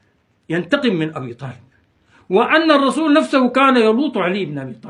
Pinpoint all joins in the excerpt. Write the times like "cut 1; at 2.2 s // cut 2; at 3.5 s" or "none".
cut 1; at 1.9 s

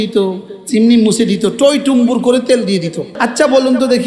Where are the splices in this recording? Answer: cut 1; at 3.2 s

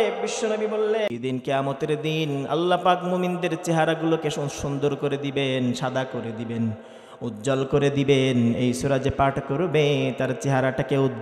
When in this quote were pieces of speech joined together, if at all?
cut 1; at 1.1 s

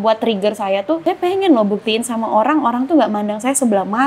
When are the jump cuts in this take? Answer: cut 1; at 1.0 s

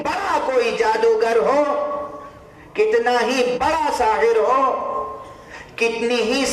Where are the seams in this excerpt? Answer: none

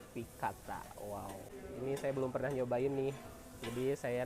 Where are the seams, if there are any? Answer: cut 1; at 1.5 s

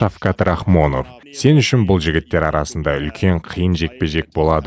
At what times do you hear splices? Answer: cut 1; at 1.2 s

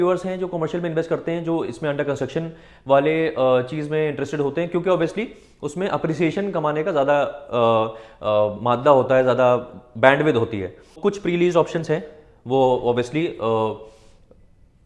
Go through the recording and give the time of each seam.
cut 1; at 11.0 s

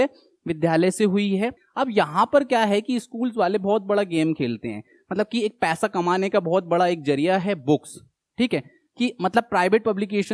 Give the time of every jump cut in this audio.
cut 1; at 1.6 s

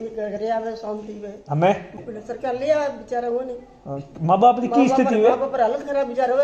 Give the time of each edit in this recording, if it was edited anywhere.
cut 1; at 2.0 s

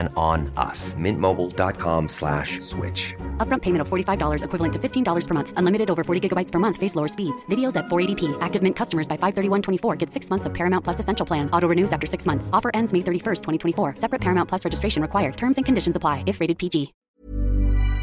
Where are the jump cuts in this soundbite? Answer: cut 1; at 17.0 s

